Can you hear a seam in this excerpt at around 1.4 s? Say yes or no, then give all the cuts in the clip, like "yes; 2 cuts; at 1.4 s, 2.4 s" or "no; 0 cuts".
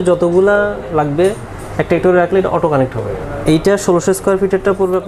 no; 1 cut; at 3.2 s